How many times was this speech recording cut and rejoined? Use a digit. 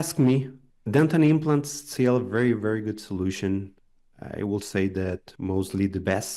1